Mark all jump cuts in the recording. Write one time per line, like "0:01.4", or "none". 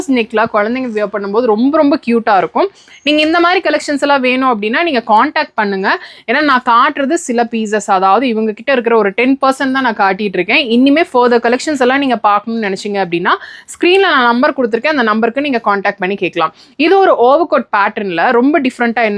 none